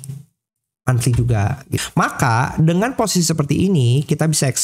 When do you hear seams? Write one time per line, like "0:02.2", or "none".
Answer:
0:01.8